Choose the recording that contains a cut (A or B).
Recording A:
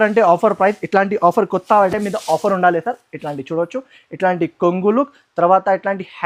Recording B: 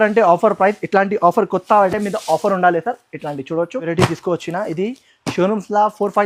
B